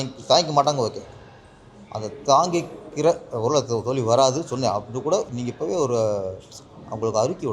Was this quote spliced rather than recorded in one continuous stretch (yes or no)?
no